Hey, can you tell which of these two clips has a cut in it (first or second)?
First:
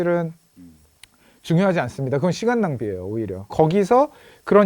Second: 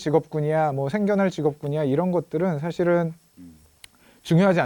first